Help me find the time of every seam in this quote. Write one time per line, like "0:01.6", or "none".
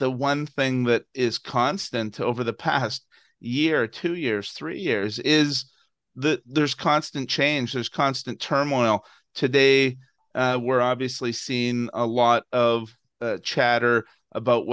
none